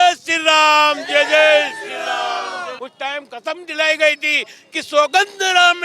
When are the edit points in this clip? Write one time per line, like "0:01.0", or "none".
0:02.7